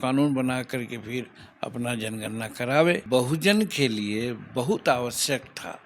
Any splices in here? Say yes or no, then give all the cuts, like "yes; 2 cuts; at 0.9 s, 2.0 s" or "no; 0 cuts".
yes; 1 cut; at 3.0 s